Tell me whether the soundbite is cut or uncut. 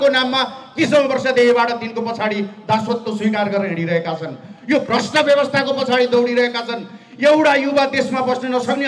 uncut